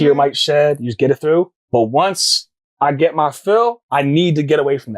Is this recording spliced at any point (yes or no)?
yes